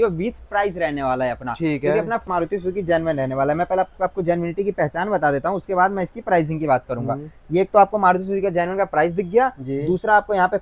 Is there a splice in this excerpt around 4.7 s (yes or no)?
no